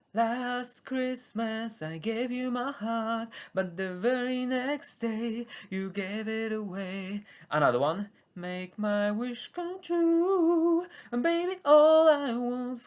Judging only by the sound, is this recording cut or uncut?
uncut